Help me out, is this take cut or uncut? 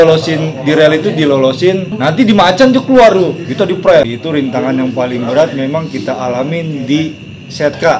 cut